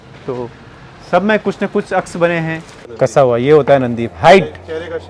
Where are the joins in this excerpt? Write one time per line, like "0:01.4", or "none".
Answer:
0:02.8